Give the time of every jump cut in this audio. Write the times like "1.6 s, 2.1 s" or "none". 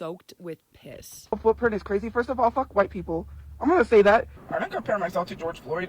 1.2 s, 4.3 s

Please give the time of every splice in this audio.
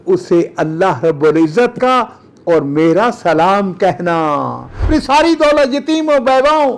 4.7 s

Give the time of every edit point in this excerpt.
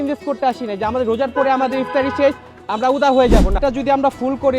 3.6 s

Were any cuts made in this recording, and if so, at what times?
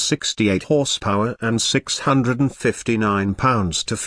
none

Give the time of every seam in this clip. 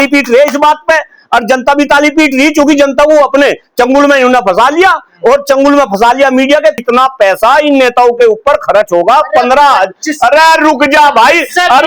6.8 s

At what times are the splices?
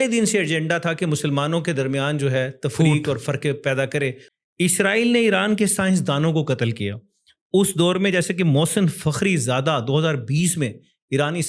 4.3 s

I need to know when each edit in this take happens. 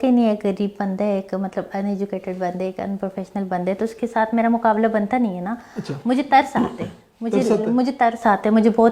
none

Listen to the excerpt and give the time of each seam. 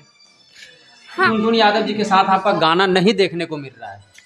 1.3 s

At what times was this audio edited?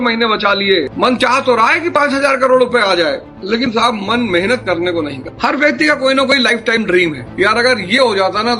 0.9 s, 5.2 s

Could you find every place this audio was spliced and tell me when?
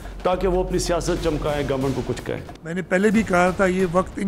2.5 s

